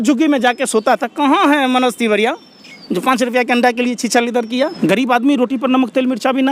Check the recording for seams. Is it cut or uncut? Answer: cut